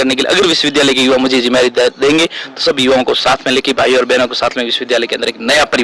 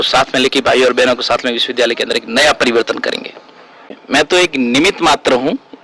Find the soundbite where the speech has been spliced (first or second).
second